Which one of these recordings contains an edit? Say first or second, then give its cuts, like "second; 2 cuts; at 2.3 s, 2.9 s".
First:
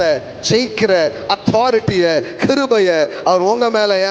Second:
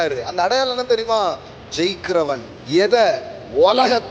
second; 1 cut; at 2.5 s